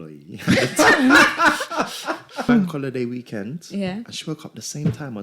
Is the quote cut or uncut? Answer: cut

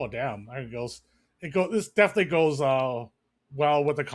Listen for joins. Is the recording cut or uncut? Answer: uncut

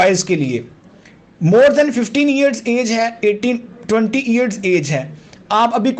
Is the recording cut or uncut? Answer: uncut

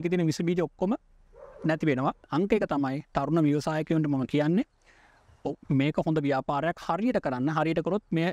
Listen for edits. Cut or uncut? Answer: cut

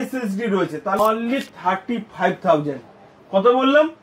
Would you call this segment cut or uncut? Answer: cut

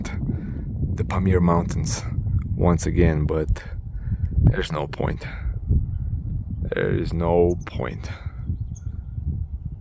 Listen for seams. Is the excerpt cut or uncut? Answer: uncut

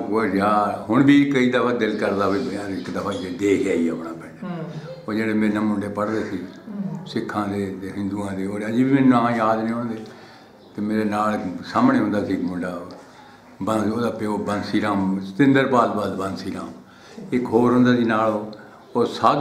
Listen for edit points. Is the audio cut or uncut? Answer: uncut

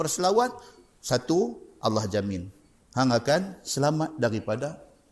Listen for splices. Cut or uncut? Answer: uncut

